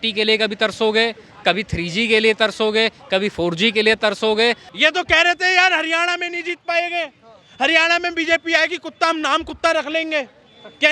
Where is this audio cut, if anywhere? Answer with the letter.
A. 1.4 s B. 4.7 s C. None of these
B